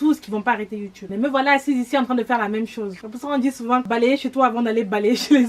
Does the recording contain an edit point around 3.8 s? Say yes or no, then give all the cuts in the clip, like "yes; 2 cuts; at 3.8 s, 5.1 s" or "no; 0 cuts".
yes; 3 cuts; at 1.0 s, 3.1 s, 3.8 s